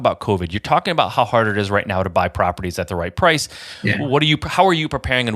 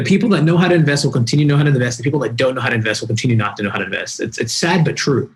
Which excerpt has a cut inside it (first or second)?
first